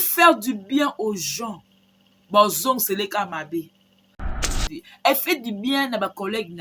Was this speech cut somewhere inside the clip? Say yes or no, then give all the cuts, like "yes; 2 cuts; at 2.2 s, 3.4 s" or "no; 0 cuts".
yes; 1 cut; at 4.3 s